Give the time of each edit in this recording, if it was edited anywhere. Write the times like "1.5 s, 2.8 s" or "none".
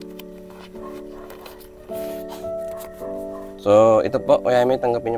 3.5 s